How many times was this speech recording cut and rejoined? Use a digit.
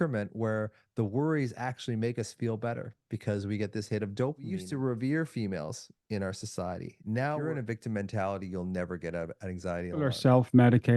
3